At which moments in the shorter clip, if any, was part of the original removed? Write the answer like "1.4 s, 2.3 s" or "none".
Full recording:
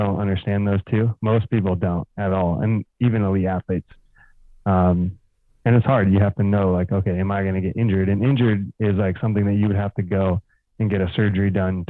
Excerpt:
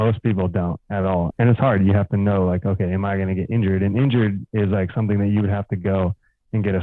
1.3 s